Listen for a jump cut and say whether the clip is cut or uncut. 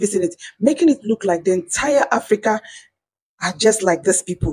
uncut